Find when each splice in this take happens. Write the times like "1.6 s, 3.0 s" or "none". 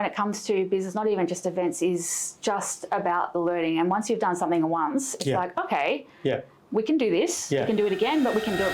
none